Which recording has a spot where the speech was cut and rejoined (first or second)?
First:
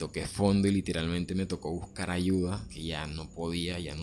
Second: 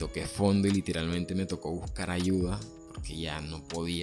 first